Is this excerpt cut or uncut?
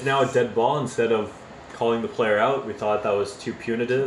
uncut